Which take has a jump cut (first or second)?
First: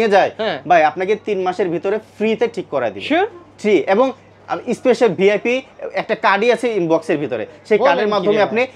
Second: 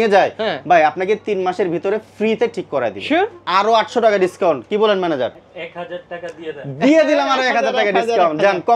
second